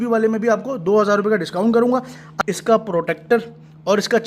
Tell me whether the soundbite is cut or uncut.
cut